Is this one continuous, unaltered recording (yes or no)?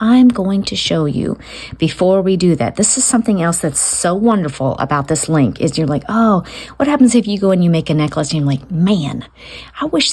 yes